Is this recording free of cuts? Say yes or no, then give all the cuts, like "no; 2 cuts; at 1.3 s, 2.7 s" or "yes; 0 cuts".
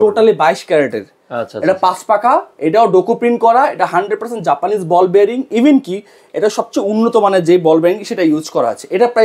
yes; 0 cuts